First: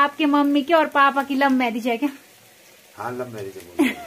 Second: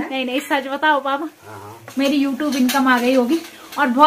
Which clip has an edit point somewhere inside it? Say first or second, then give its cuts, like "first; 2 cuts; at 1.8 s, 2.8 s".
second; 1 cut; at 1.8 s